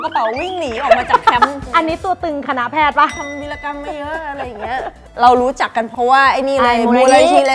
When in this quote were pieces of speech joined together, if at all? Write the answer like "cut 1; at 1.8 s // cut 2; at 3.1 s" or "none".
none